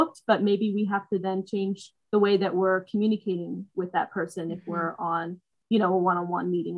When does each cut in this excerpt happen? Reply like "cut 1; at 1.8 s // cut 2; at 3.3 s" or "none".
none